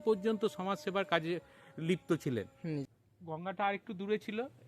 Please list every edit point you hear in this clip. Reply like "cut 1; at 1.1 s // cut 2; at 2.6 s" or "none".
cut 1; at 2.9 s